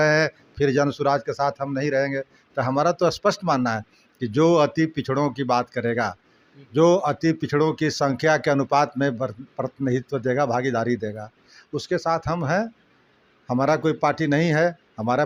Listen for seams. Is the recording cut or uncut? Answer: uncut